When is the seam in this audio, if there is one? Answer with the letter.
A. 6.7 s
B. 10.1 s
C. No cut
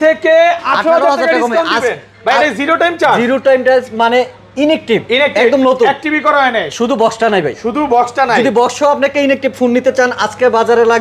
C